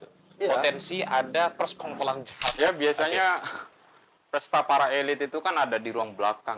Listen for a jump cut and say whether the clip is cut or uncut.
cut